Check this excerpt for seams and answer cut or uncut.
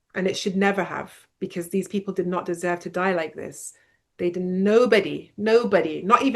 uncut